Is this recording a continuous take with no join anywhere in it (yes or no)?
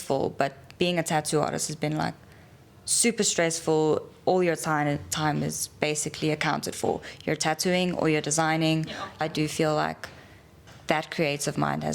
no